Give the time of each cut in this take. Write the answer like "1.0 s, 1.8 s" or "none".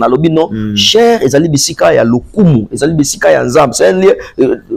none